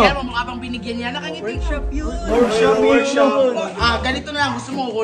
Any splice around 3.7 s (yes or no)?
yes